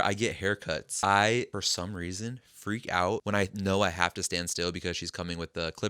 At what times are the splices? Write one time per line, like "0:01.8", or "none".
0:00.9
0:01.5
0:03.2